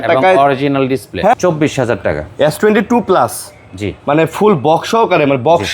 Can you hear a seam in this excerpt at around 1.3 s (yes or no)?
yes